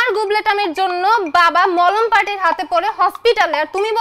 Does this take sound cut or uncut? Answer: uncut